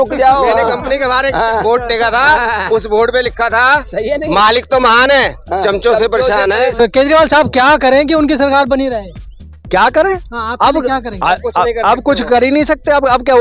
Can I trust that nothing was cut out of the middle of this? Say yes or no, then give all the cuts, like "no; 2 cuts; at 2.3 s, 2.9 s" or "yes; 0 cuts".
no; 1 cut; at 6.8 s